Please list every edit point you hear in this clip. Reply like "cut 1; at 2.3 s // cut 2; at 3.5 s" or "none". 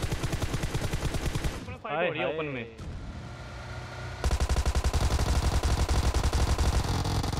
cut 1; at 2.4 s